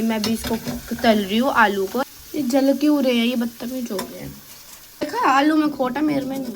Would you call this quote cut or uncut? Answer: cut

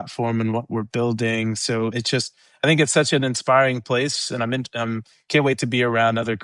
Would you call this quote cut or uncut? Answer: uncut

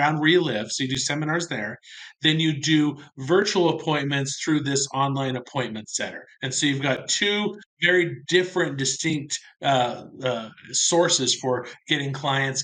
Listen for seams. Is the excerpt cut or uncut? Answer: uncut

